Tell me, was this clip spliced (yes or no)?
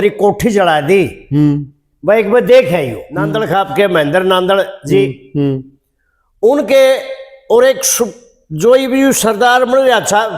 yes